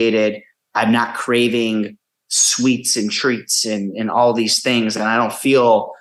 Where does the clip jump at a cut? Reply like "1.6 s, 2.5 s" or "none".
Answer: none